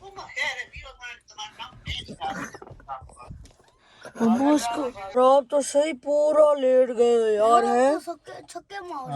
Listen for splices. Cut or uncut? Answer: cut